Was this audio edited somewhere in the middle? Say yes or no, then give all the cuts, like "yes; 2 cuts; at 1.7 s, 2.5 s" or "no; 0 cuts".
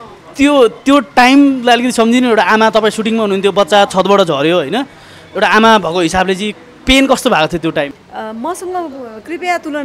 yes; 1 cut; at 8.0 s